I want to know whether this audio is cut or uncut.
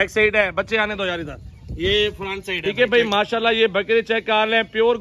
cut